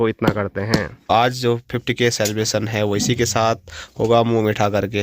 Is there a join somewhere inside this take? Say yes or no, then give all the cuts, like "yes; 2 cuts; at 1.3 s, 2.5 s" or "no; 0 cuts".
yes; 1 cut; at 1.1 s